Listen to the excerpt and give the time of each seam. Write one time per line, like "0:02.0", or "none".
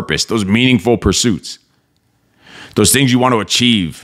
none